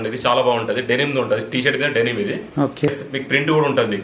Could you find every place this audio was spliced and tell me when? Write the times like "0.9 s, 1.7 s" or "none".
2.9 s